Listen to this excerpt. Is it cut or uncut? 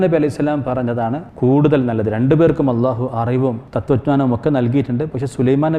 cut